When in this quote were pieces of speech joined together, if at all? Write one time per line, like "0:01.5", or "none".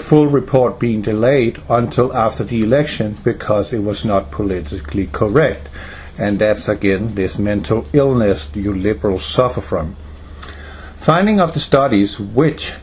0:01.6